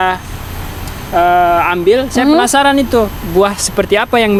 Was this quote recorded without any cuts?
yes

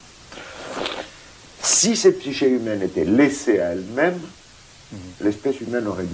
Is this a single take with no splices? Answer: no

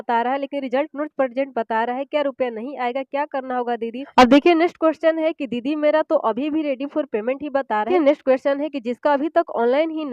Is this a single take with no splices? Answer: no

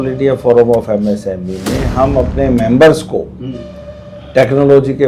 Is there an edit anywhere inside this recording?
no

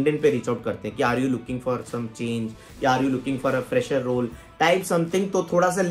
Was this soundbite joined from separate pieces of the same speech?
no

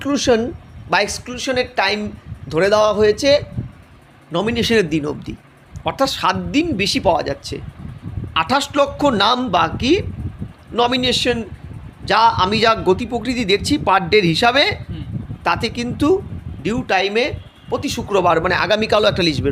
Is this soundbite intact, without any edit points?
yes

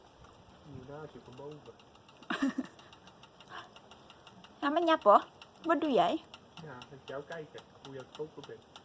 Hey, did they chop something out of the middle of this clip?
no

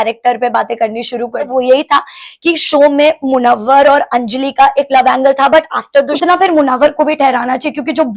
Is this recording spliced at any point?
yes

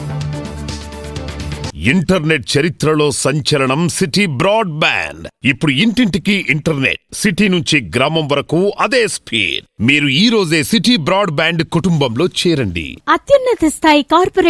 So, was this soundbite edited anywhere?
yes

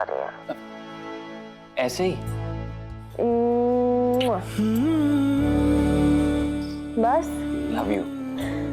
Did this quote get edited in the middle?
yes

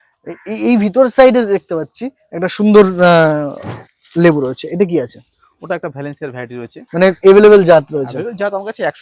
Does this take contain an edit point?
no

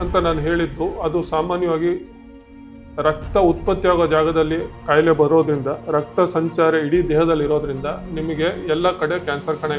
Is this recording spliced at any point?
no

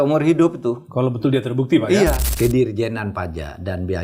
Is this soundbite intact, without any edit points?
no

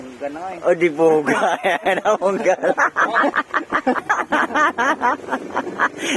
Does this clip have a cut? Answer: yes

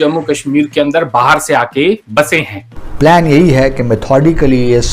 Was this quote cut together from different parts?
yes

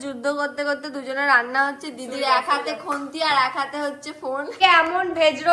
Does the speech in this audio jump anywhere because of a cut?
yes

